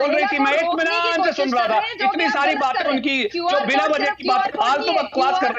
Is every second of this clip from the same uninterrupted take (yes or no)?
yes